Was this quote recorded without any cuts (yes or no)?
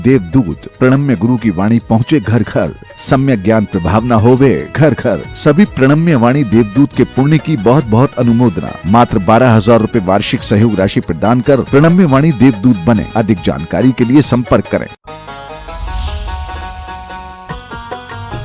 no